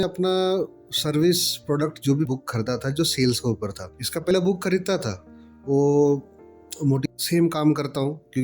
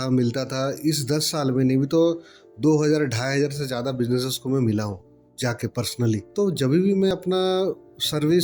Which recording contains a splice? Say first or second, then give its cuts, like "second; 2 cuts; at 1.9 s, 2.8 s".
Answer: first; 2 cuts; at 2.3 s, 7.0 s